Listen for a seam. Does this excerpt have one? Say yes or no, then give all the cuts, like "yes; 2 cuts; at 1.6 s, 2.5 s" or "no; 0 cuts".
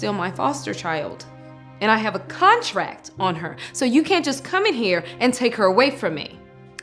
no; 0 cuts